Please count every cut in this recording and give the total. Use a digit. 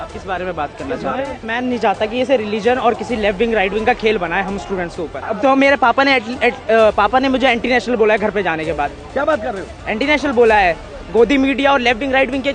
2